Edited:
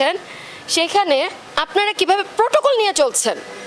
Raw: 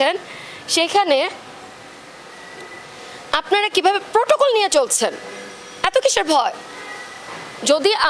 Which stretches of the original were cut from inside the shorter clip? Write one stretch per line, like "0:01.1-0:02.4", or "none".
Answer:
0:01.4-0:03.2

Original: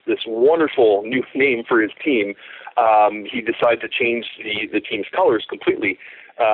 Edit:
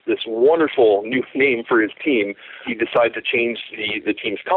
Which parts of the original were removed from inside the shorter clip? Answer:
0:02.6-0:03.3

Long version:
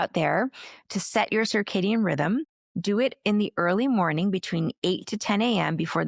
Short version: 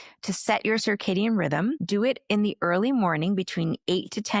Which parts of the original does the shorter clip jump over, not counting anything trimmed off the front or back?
0:02.5-0:02.8

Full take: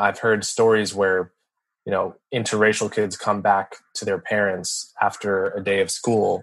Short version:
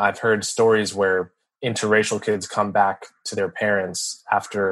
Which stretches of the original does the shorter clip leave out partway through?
0:01.5-0:02.2

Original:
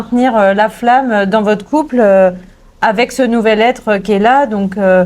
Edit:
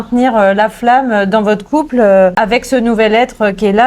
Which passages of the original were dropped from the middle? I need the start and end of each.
0:02.4-0:02.8

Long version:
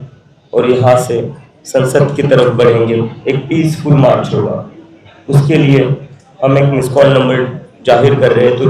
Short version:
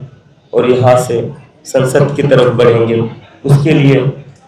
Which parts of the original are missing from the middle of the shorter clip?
0:03.1-0:05.0

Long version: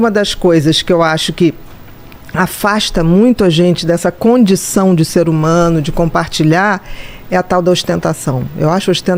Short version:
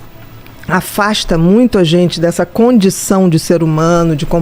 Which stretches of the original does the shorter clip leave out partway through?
none

